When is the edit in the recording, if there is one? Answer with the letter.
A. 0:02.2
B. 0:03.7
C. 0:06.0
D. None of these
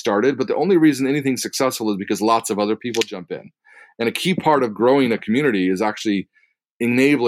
D